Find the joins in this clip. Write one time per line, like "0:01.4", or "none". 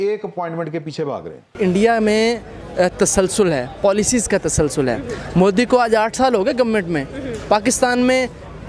0:01.6